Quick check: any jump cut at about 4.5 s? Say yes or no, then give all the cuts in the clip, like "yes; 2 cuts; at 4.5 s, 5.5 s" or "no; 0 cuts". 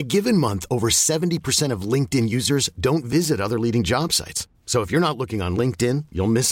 no; 0 cuts